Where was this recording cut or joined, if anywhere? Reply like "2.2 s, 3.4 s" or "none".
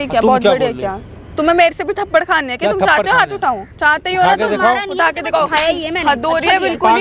none